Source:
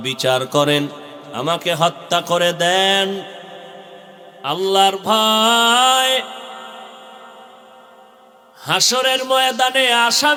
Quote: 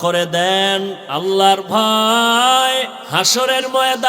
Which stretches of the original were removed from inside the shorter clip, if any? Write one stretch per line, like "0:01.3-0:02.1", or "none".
0:03.3-0:04.4
0:06.3-0:08.5